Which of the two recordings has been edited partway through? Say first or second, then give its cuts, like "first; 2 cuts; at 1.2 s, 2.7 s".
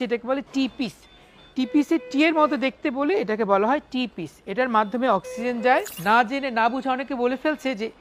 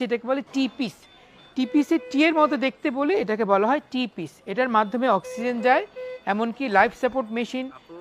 first; 1 cut; at 5.9 s